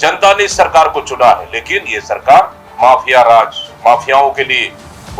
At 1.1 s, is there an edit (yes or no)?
no